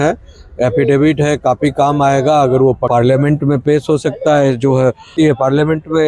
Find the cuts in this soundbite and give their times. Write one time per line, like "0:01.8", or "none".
0:02.8
0:05.1